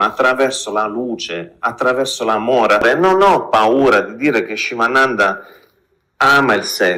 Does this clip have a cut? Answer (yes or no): no